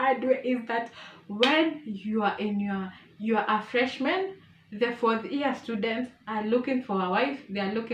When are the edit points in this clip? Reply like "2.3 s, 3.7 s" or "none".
none

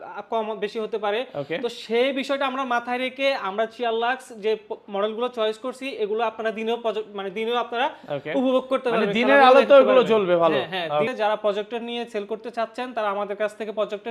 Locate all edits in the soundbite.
11.1 s

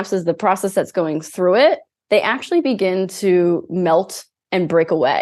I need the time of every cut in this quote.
none

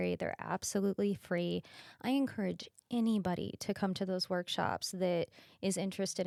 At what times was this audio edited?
none

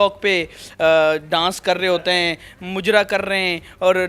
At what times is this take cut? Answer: none

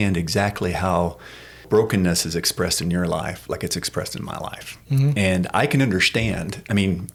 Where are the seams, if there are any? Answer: none

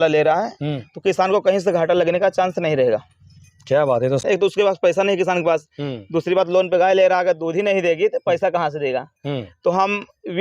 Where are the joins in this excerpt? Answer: 4.2 s

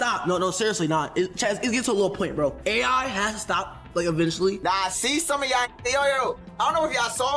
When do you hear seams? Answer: 4.5 s

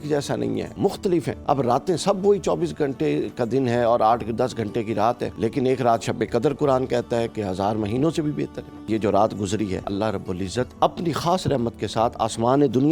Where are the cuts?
1.1 s, 5.3 s, 8.9 s, 10.3 s

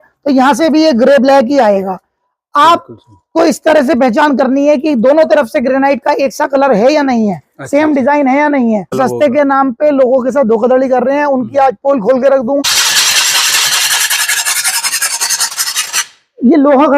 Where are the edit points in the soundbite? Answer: 8.9 s, 12.6 s

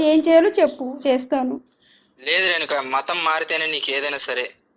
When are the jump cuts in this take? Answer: none

